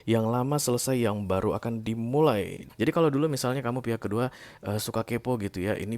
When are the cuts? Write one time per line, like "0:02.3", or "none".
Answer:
0:02.6

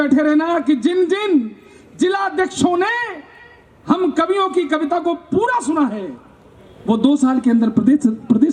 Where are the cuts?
none

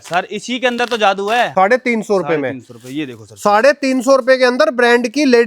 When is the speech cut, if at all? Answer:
0:01.5

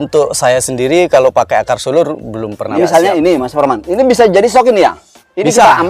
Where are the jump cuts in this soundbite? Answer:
0:02.7

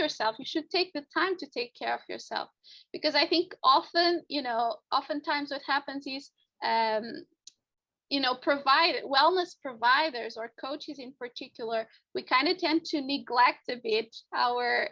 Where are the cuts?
none

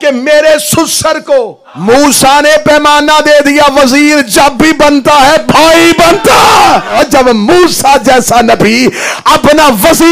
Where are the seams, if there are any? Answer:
0:01.6
0:06.9

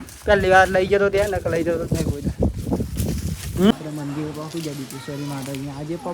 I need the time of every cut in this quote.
0:03.7

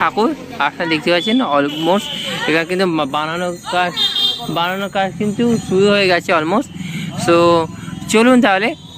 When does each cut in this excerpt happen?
none

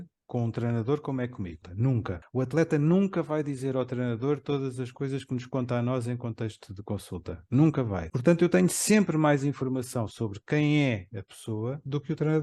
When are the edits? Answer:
0:01.8
0:08.0

